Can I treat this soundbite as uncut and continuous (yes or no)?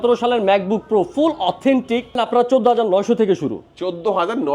no